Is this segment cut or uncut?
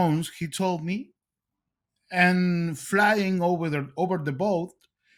uncut